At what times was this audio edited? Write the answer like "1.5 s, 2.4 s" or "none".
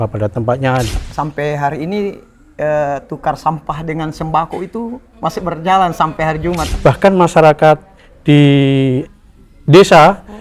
0.9 s, 6.7 s